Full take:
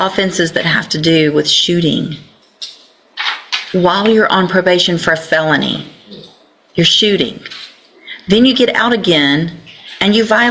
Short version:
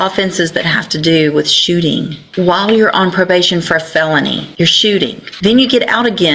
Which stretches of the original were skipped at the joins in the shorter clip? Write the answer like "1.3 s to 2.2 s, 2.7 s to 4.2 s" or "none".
2.2 s to 3.6 s, 5.8 s to 6.6 s, 7.4 s to 8.1 s